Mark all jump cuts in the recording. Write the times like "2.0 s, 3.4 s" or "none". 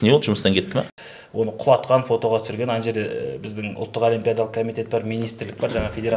1.0 s